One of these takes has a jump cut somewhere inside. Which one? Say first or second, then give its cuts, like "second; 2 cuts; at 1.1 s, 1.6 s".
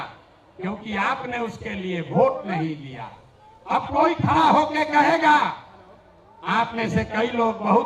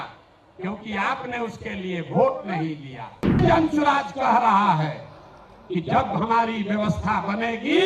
second; 1 cut; at 3.4 s